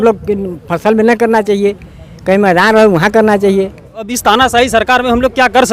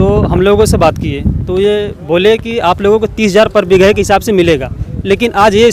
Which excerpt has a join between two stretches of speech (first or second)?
first